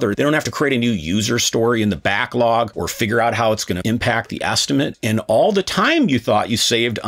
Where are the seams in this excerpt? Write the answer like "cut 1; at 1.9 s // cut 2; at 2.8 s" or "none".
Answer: cut 1; at 3.8 s // cut 2; at 4.9 s

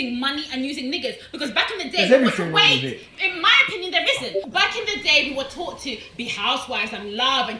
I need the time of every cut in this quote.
cut 1; at 4.4 s

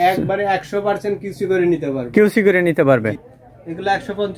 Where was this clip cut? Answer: cut 1; at 3.3 s

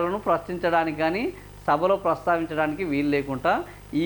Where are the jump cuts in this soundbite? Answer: none

